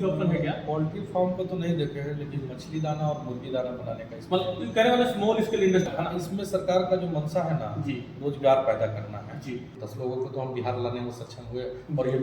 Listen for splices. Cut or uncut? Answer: cut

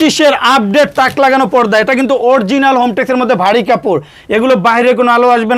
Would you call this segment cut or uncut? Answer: uncut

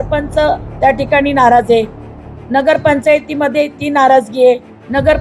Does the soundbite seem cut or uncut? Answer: uncut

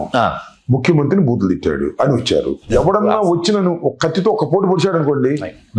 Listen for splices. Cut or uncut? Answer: cut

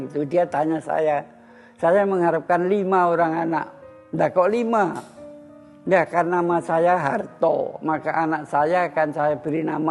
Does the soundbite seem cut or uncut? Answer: uncut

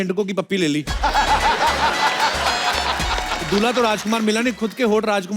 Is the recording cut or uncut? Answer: uncut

